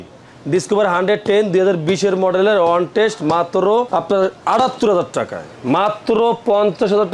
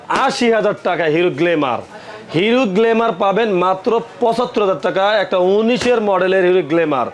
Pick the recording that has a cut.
first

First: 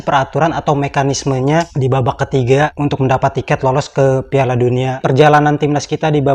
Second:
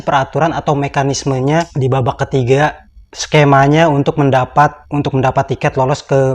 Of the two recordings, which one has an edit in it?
first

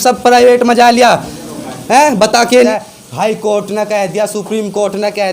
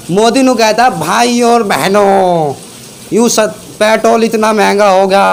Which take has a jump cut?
first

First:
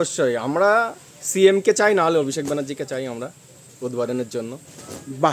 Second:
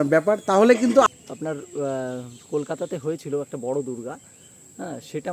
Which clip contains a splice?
second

